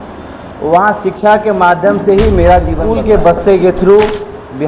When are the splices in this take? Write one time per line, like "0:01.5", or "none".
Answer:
0:02.8

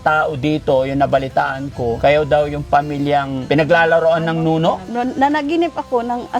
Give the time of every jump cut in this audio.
0:02.0
0:03.4
0:04.8

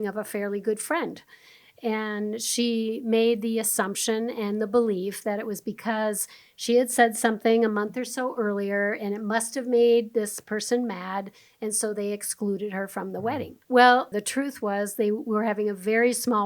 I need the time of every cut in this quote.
0:13.6
0:14.1

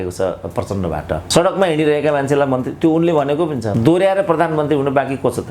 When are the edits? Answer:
0:01.2
0:03.7

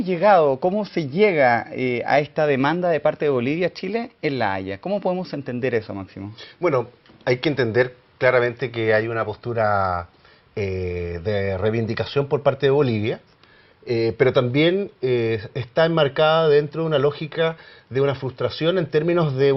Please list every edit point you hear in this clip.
none

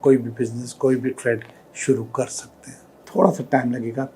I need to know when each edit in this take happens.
0:03.0

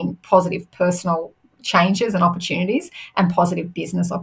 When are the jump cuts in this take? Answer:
none

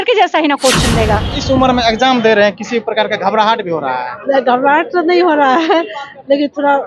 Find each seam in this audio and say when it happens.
0:01.3

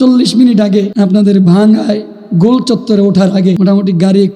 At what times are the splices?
0:00.9
0:03.6

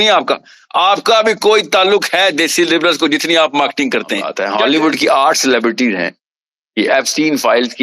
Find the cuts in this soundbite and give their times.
0:04.4

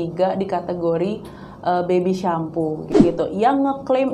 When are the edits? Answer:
0:02.9

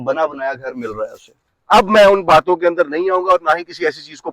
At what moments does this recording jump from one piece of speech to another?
0:01.3

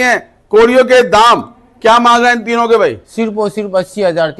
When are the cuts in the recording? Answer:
none

